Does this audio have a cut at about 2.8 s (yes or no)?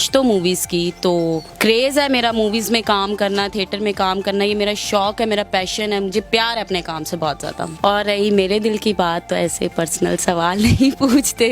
no